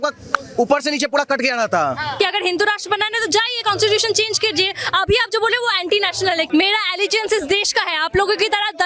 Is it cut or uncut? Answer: cut